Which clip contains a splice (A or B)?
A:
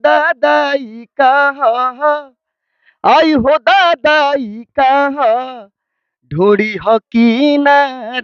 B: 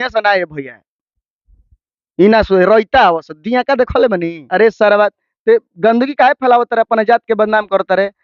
B